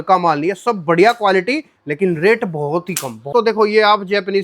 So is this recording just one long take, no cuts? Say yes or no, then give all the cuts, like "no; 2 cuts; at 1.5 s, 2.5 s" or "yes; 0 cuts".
no; 1 cut; at 3.3 s